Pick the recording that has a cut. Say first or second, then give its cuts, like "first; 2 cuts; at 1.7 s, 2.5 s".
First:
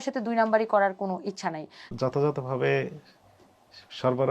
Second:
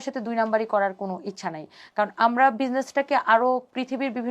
first; 1 cut; at 1.9 s